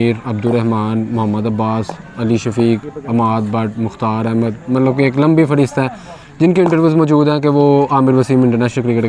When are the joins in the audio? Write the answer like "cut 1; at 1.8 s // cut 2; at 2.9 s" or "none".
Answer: none